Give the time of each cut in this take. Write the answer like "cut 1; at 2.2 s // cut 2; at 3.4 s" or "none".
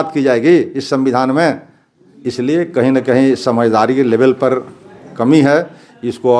none